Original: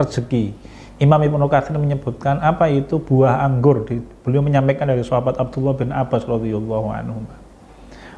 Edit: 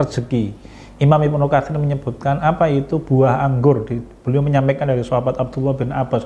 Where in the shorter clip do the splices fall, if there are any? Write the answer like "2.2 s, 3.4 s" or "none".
none